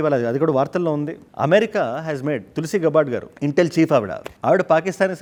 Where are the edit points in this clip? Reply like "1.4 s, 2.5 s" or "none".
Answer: none